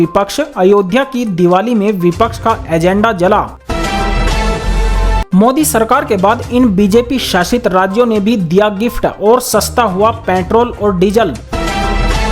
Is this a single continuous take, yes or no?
no